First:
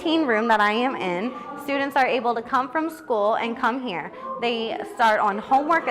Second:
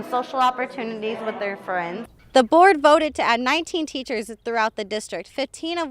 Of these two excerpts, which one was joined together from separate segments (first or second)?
second